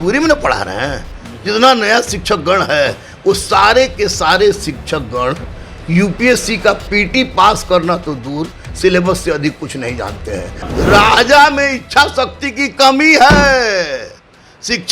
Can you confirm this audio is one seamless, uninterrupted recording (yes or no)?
no